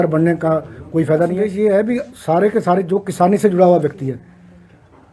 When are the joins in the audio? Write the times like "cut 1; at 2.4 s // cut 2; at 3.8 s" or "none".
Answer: cut 1; at 1.4 s